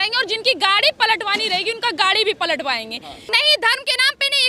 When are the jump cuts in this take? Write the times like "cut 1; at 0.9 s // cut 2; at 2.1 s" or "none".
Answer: cut 1; at 3.2 s